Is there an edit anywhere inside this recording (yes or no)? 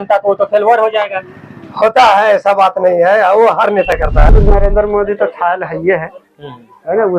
yes